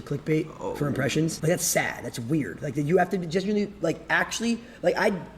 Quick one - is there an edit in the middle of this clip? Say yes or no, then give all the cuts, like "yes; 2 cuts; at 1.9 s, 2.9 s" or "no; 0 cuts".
yes; 2 cuts; at 1.4 s, 2.7 s